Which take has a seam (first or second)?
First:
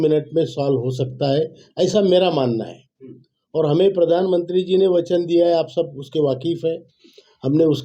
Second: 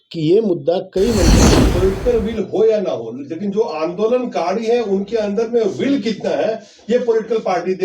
second